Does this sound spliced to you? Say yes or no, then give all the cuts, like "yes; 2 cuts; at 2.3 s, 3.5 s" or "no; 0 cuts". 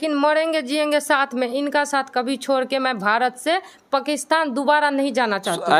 no; 0 cuts